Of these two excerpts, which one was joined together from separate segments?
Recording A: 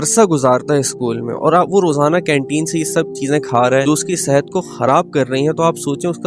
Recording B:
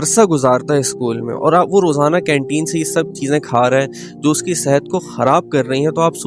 A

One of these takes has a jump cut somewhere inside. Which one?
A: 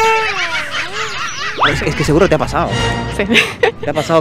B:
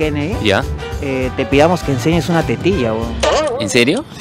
A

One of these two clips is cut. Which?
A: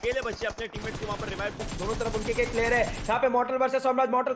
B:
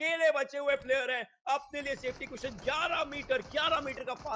A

